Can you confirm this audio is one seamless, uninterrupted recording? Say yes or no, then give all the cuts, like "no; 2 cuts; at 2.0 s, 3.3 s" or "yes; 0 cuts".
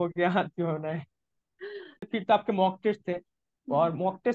no; 1 cut; at 2.1 s